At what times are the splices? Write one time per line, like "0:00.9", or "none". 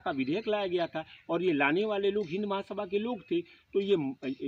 none

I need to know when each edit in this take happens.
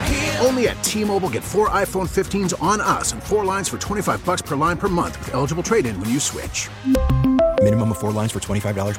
none

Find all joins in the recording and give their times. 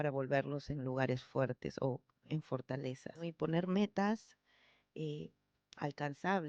0:03.2

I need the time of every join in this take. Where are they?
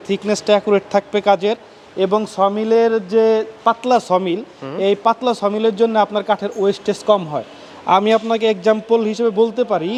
none

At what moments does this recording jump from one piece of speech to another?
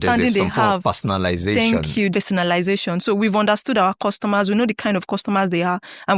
0:02.1

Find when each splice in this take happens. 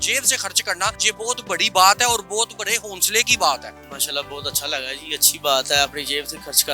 0:01.0
0:03.8

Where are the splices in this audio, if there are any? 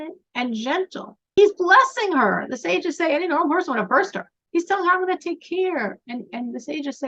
0:04.3

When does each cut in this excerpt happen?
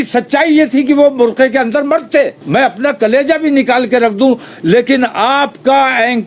0:02.4

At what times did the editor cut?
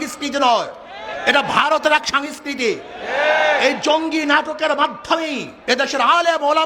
none

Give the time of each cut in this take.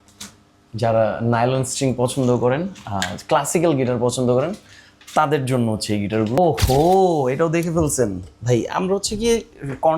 0:06.4

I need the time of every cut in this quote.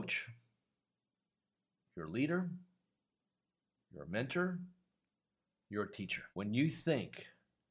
0:06.2

